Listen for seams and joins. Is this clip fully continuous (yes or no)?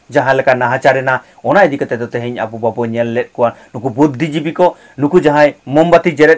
yes